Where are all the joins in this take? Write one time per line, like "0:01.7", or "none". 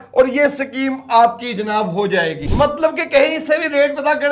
0:02.4